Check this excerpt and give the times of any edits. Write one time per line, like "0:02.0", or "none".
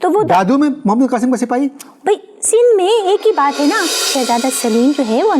0:04.0